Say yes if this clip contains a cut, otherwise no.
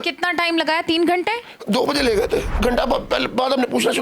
yes